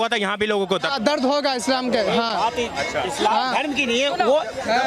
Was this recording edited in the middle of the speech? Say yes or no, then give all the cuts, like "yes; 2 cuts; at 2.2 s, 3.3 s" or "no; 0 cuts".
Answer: no; 0 cuts